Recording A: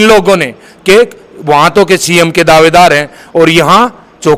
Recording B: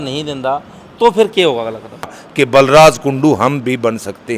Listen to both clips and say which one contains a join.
B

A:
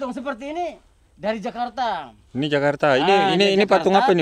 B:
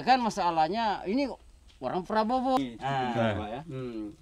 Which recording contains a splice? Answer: B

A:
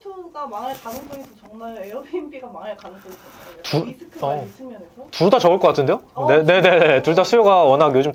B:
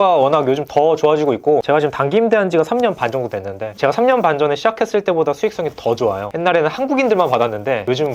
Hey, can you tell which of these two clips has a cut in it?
B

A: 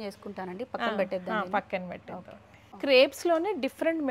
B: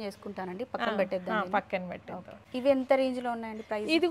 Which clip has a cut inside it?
B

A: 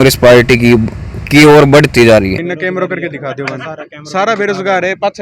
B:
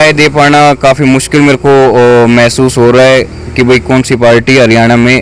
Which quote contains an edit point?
A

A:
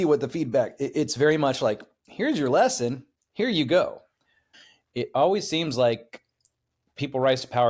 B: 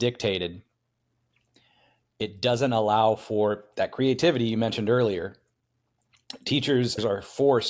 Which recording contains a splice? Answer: A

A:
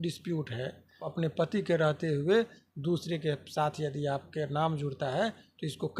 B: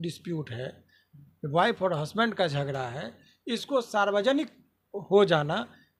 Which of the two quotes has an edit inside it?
A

